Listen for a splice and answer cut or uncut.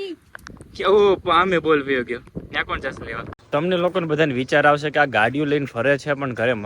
cut